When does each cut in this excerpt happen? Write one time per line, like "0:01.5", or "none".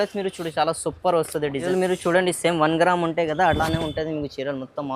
0:01.7